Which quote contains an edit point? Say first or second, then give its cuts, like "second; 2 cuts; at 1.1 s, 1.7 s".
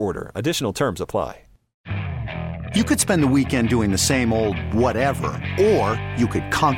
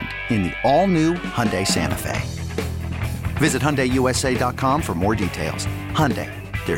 first; 1 cut; at 1.7 s